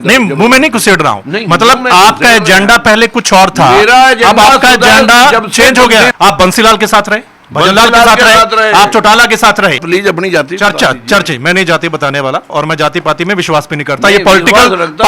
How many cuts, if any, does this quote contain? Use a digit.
2